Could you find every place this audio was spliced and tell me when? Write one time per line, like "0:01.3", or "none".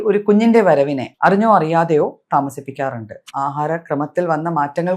0:01.0
0:03.3

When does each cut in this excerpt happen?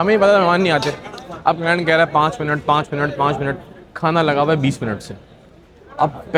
none

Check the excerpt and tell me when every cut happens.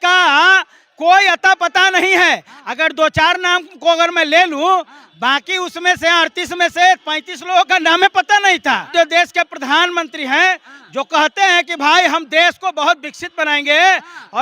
0:08.9

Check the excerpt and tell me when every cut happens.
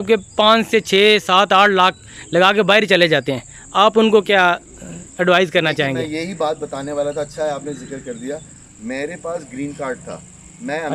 none

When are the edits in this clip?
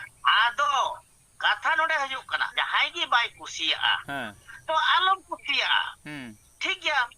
0:02.5

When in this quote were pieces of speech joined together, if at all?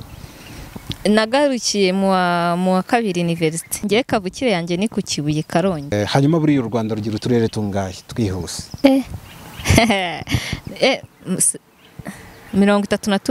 0:03.8
0:05.9
0:08.6

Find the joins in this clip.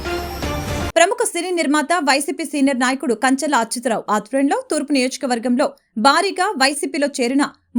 0:00.9

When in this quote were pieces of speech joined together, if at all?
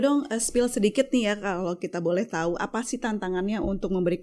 none

